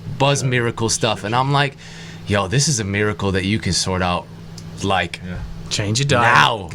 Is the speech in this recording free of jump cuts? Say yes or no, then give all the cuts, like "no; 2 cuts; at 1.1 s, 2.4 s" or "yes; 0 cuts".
yes; 0 cuts